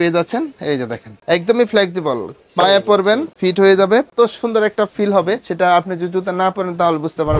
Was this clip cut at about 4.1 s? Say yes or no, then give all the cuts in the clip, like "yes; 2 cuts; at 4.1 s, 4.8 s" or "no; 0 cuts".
yes; 3 cuts; at 1.1 s, 3.3 s, 4.1 s